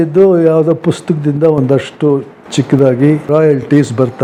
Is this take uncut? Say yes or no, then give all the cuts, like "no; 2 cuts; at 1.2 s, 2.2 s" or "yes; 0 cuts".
yes; 0 cuts